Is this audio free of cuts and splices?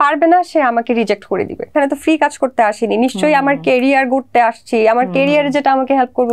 no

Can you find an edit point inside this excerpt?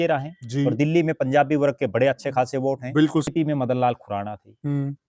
yes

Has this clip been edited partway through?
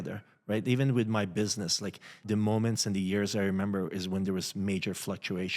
yes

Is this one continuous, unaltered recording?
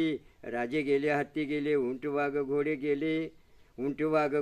yes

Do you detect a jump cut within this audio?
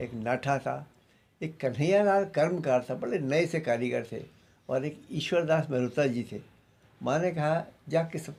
no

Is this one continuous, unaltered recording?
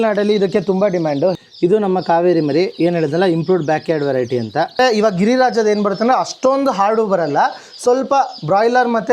no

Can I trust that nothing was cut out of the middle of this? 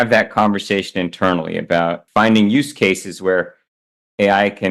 no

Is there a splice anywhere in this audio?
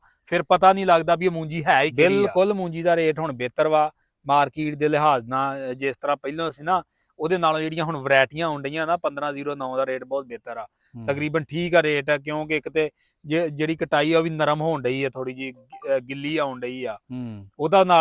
yes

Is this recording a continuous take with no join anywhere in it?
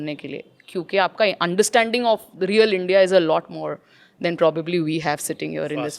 yes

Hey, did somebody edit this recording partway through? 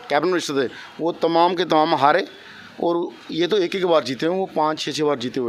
no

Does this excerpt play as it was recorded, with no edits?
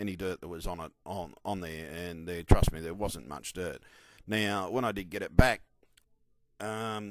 yes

